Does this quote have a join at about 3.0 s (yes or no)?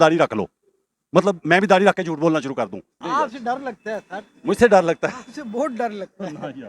yes